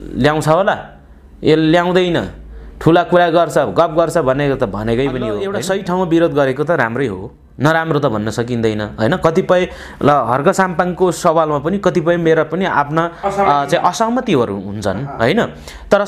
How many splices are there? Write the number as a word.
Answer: one